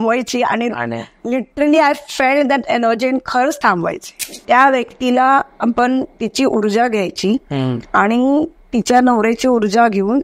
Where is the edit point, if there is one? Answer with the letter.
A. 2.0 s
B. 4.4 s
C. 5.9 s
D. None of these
B